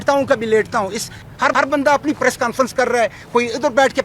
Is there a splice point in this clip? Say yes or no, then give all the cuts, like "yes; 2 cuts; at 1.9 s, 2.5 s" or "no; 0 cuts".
yes; 1 cut; at 1.2 s